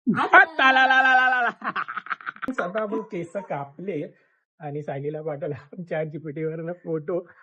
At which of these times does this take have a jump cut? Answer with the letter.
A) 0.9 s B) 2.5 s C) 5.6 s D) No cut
B